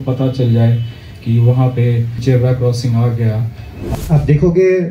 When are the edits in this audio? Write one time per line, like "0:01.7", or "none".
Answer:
0:02.2
0:03.9